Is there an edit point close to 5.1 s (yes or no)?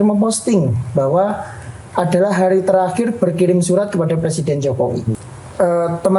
yes